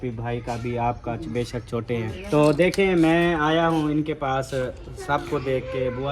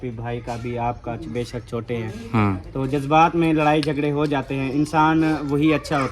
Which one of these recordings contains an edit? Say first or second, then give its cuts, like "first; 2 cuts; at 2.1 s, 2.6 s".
first; 1 cut; at 2.2 s